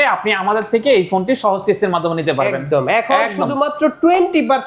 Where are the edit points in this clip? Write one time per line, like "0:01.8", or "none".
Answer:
none